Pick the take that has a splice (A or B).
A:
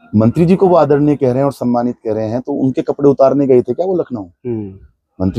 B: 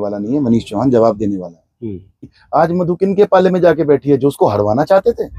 B